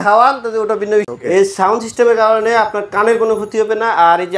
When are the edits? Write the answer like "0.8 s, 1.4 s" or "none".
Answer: 1.1 s